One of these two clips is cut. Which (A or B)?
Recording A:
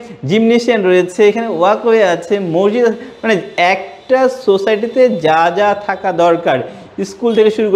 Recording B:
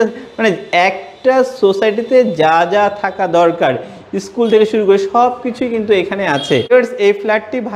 B